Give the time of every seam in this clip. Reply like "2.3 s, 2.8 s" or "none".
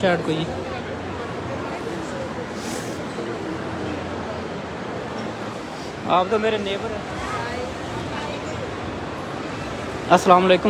6.8 s